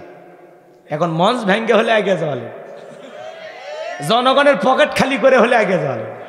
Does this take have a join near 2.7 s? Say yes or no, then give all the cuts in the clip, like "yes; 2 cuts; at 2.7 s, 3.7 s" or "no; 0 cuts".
no; 0 cuts